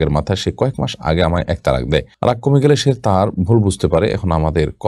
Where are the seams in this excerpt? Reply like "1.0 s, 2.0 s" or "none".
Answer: none